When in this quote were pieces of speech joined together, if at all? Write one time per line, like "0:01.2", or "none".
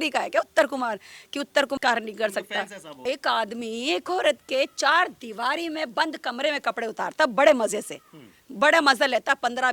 0:01.8
0:03.0